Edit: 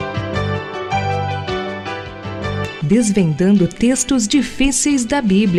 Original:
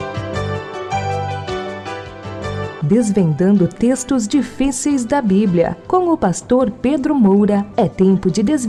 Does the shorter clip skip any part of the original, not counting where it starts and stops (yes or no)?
no